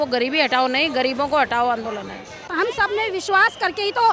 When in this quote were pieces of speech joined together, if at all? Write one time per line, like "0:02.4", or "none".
0:02.5